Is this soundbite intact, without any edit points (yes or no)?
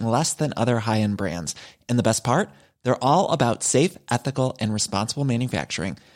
yes